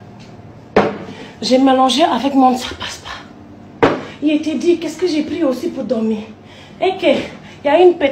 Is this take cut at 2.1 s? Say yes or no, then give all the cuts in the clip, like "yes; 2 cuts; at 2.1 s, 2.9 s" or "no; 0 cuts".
yes; 2 cuts; at 0.8 s, 2.1 s